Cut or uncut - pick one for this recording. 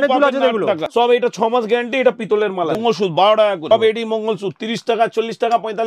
cut